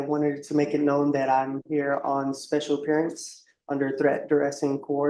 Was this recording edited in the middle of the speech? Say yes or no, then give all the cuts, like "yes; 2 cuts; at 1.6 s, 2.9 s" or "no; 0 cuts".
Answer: no; 0 cuts